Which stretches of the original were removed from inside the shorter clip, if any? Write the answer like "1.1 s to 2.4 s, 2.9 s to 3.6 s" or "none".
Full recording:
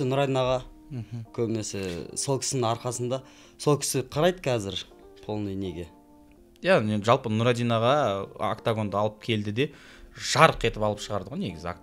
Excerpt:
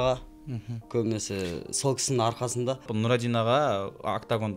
3.3 s to 7.3 s